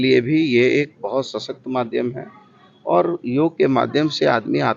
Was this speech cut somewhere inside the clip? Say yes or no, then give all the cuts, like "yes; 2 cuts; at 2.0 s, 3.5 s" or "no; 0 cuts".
no; 0 cuts